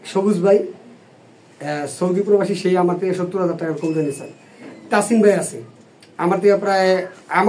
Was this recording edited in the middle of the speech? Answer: no; 0 cuts

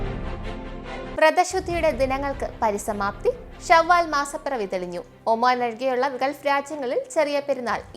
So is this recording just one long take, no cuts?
no; 1 cut; at 1.1 s

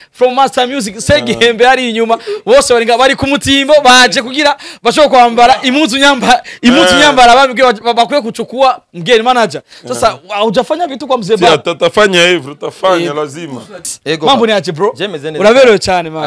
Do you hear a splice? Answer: yes; 1 cut; at 14.0 s

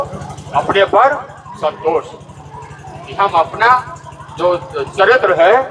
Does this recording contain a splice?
no; 0 cuts

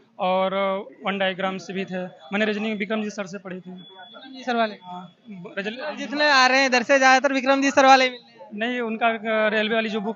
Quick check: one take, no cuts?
yes; 0 cuts

